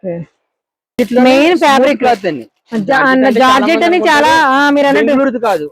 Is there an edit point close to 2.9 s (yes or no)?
no